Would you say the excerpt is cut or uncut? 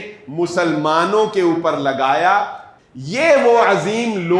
cut